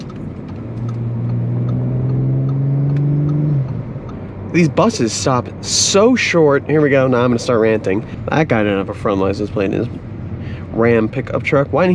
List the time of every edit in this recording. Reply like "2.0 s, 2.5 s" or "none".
4.1 s, 8.1 s